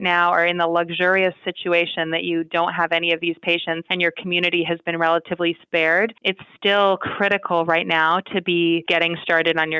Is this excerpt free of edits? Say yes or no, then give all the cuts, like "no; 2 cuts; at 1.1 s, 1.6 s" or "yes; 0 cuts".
no; 3 cuts; at 3.9 s, 6.2 s, 8.8 s